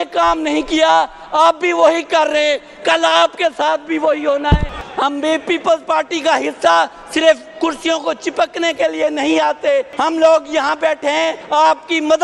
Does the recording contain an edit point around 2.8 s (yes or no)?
no